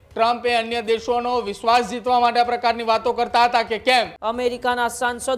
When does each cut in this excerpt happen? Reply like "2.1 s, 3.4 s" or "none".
4.2 s